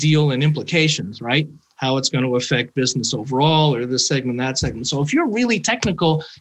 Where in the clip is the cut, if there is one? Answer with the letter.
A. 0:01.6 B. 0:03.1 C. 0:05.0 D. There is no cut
D